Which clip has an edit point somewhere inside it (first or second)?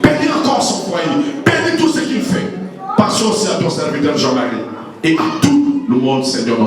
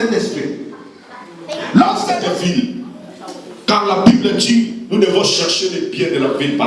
second